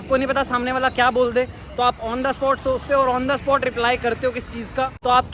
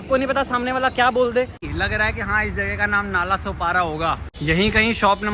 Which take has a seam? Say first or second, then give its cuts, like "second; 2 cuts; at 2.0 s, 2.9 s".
second; 2 cuts; at 1.6 s, 4.4 s